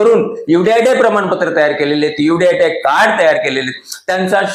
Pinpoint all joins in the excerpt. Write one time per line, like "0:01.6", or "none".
none